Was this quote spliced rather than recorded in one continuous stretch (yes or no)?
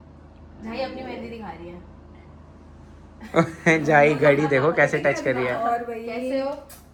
no